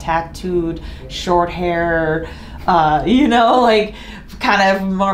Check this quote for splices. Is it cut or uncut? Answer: uncut